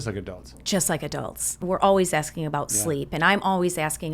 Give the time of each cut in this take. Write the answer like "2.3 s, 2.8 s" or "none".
1.6 s